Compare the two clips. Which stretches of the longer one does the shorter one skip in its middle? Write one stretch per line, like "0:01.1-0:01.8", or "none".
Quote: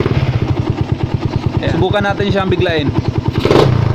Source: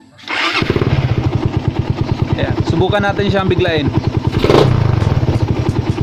0:02.5-0:02.7